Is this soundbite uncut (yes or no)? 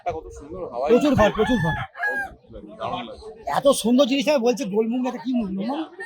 yes